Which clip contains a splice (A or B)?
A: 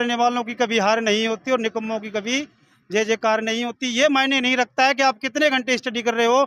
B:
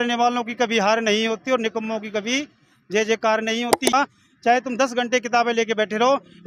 B